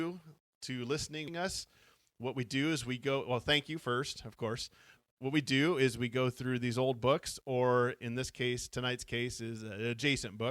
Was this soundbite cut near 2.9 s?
no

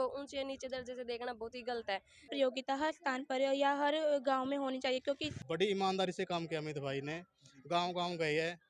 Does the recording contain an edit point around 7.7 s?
no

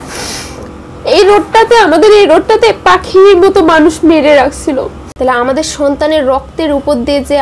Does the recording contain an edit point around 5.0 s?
yes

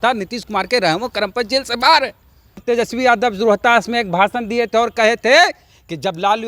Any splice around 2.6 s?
yes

